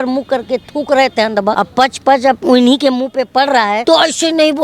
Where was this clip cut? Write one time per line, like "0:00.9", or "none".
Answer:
0:01.5
0:03.8